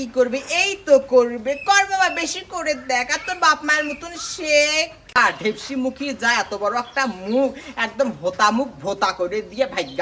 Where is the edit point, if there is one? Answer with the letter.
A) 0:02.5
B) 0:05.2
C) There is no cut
B